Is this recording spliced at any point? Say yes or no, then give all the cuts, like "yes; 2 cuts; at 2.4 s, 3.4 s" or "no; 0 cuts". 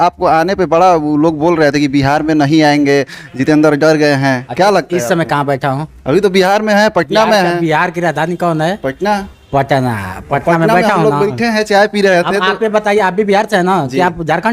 no; 0 cuts